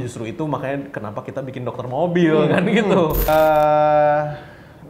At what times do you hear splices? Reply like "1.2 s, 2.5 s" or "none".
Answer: 3.2 s